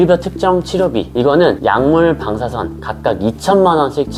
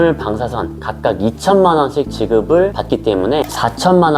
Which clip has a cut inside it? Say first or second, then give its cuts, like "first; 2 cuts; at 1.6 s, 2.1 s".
second; 1 cut; at 3.1 s